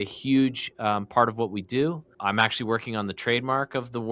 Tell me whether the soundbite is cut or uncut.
cut